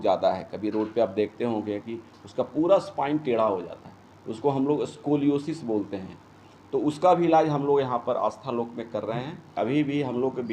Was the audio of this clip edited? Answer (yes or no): yes